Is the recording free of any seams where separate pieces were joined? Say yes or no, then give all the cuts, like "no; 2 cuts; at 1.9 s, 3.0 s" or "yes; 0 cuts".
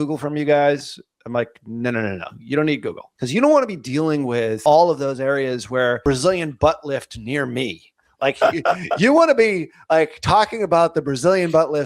no; 3 cuts; at 3.1 s, 4.6 s, 6.0 s